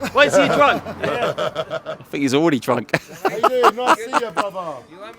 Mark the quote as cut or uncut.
uncut